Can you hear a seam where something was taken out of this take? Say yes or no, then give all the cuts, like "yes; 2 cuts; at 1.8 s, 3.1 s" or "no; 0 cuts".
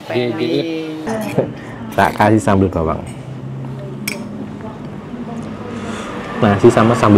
yes; 1 cut; at 1.1 s